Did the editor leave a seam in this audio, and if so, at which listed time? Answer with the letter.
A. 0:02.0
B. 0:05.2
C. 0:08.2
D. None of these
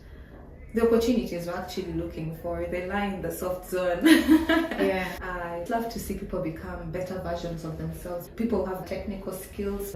B